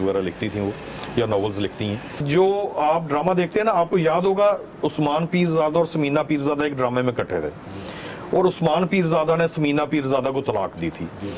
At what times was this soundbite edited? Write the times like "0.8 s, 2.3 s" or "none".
2.2 s